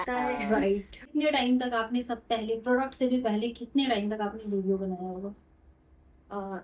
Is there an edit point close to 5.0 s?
no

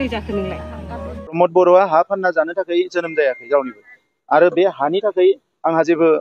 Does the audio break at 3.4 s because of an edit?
no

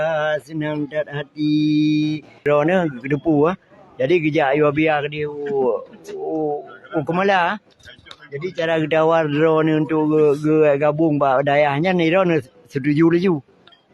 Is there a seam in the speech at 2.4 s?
yes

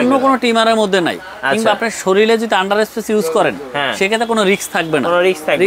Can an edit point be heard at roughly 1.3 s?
no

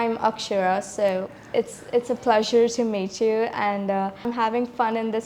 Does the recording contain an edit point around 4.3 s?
yes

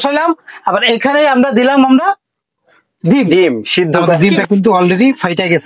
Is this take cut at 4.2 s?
yes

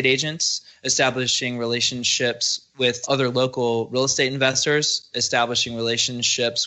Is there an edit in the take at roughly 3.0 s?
yes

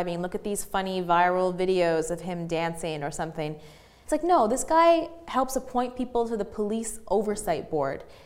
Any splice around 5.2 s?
no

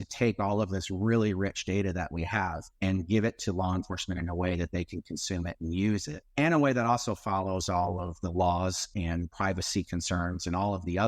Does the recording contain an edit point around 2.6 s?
yes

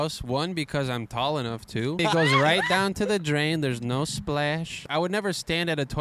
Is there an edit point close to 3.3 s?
no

